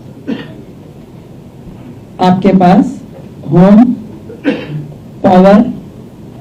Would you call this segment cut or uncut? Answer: uncut